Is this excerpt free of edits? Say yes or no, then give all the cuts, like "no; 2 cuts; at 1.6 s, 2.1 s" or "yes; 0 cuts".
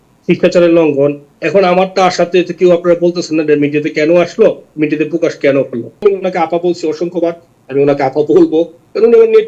no; 1 cut; at 6.0 s